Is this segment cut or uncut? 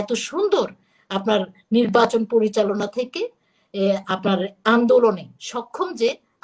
uncut